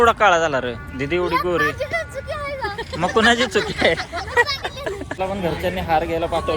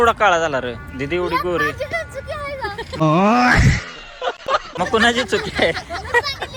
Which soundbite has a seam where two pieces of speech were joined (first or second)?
first